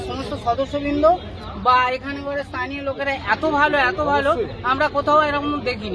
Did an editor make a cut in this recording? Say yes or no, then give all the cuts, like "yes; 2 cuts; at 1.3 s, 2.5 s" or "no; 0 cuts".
no; 0 cuts